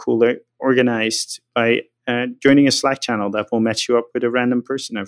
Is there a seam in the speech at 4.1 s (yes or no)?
no